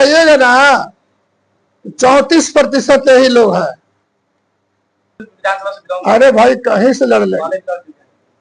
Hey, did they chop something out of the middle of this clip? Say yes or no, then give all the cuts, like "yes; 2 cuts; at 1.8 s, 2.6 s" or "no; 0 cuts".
yes; 1 cut; at 5.2 s